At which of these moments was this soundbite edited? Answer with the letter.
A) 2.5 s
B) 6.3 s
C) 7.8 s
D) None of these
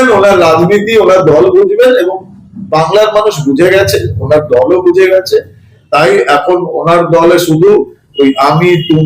D